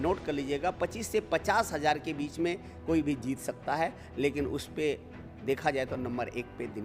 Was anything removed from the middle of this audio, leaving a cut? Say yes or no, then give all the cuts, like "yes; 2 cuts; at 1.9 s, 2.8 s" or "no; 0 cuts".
no; 0 cuts